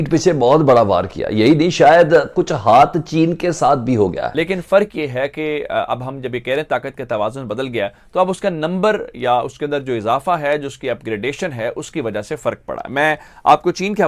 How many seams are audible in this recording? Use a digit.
1